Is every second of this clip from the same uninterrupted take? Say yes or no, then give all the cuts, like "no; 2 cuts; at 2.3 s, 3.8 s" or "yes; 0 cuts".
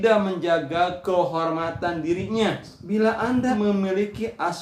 no; 2 cuts; at 2.7 s, 3.6 s